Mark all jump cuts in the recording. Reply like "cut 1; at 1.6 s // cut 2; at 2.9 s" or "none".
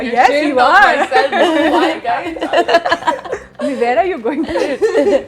none